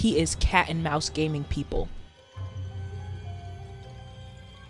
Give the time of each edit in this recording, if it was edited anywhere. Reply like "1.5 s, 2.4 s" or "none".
2.1 s